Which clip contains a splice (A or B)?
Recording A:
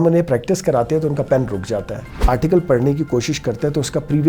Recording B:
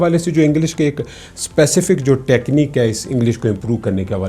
A